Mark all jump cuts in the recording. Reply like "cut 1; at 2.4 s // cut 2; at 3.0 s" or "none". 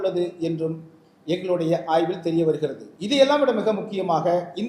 cut 1; at 2.9 s